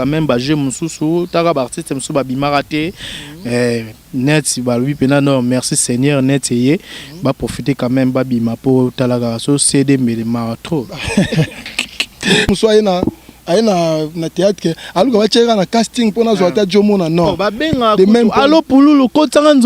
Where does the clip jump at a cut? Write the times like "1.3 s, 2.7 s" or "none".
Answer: 12.5 s